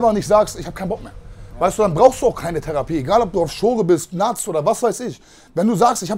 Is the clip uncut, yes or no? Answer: yes